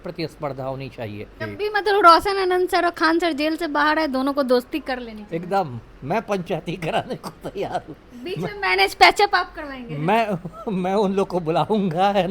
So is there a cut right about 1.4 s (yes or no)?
yes